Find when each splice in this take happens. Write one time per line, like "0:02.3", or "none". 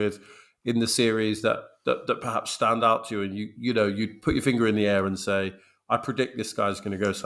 none